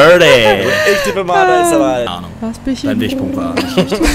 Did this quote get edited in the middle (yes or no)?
no